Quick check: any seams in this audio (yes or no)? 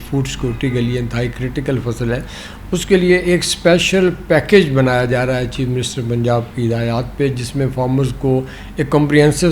no